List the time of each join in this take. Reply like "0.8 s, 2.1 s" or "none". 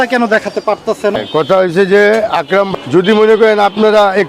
1.1 s, 2.7 s

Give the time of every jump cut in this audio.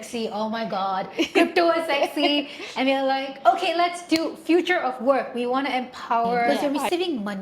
6.5 s

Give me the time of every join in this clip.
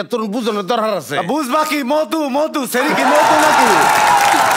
none

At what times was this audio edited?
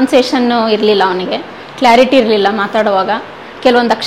none

